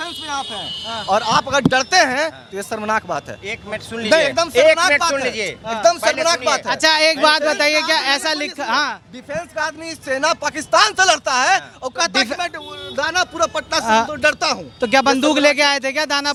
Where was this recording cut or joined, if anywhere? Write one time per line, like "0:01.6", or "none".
none

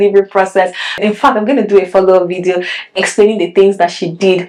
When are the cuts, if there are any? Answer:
none

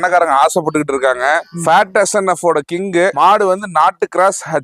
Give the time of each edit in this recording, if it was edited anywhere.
none

